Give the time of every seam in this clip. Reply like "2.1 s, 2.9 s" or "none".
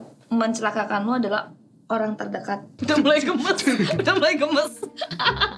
2.7 s